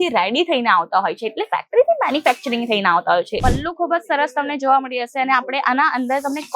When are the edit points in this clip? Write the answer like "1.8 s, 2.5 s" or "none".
3.4 s